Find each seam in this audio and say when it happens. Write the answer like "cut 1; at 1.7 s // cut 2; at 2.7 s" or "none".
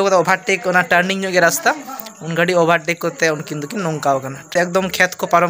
cut 1; at 4.5 s